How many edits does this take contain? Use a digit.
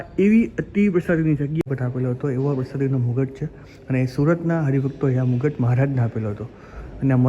1